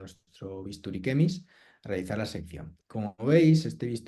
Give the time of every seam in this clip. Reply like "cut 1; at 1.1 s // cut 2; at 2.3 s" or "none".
none